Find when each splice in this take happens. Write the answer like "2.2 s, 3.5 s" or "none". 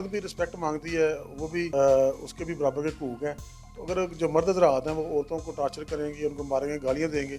1.7 s